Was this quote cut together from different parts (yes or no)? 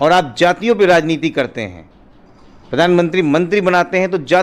no